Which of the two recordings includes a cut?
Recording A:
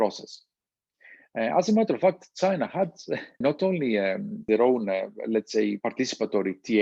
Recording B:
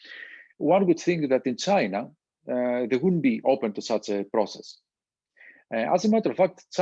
A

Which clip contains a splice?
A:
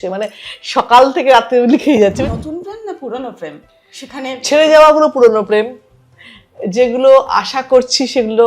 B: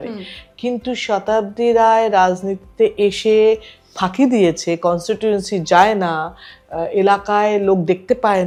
A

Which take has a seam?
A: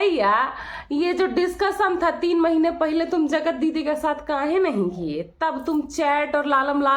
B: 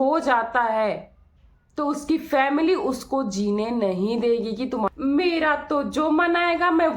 B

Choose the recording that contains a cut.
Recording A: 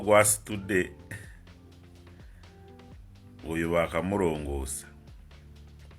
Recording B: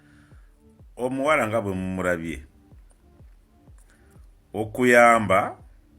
B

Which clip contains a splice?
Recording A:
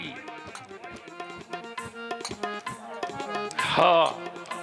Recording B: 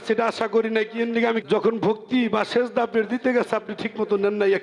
B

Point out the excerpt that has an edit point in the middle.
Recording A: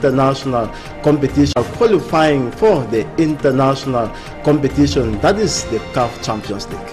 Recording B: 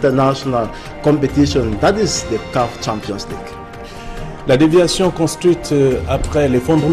B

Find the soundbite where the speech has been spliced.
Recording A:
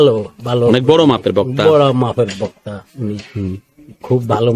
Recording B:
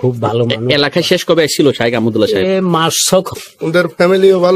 B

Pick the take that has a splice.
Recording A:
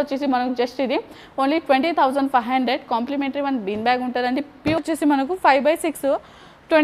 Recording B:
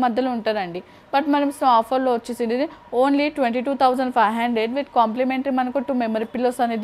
A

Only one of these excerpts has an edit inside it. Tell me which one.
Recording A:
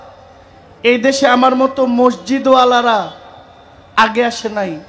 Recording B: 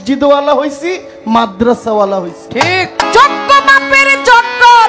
B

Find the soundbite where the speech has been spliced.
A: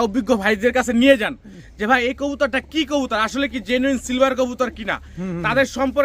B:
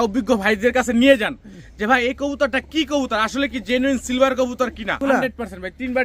B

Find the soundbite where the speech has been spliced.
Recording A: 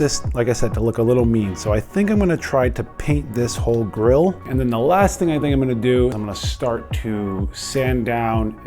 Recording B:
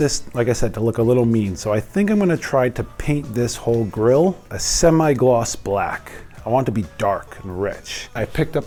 A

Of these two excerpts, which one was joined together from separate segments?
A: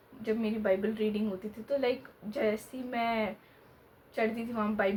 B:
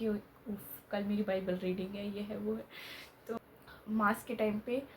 B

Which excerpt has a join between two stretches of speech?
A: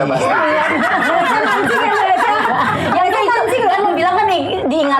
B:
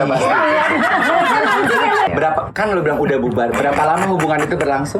B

